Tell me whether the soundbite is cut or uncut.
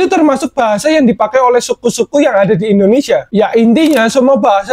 cut